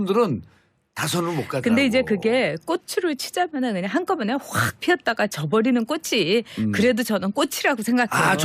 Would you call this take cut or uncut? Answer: cut